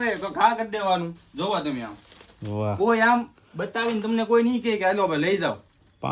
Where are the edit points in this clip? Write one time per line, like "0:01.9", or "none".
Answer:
none

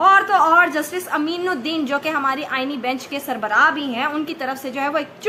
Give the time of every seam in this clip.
none

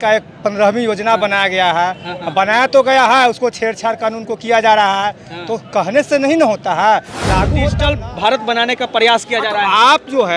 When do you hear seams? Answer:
0:07.6

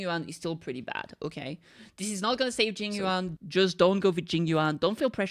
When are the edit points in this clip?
0:03.3

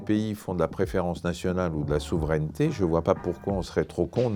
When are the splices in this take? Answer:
none

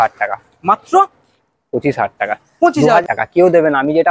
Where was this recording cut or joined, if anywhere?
0:03.0

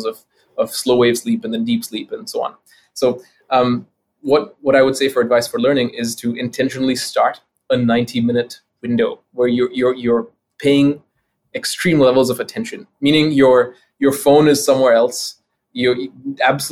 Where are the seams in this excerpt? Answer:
none

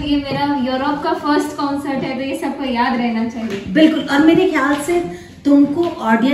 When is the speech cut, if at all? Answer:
none

